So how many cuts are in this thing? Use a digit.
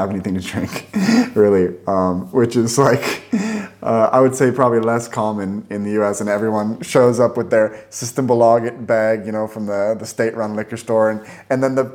0